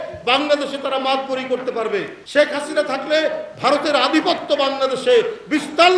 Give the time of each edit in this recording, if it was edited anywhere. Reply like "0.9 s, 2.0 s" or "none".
2.2 s